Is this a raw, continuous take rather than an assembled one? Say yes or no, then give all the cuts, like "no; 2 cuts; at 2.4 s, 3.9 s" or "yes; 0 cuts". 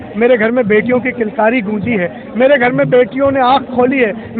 yes; 0 cuts